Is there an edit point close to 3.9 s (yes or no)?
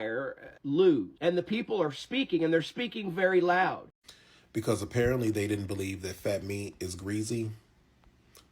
yes